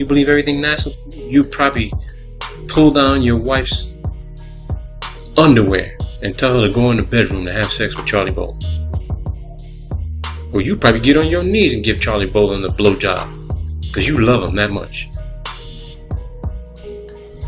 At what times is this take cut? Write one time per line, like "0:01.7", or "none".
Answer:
0:13.9